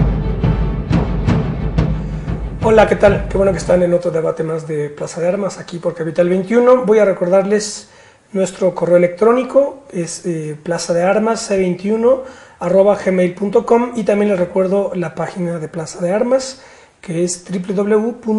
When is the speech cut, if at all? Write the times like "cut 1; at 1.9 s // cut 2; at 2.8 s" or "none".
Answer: none